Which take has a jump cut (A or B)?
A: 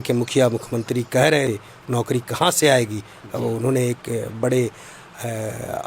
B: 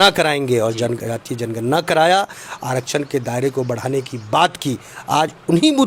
A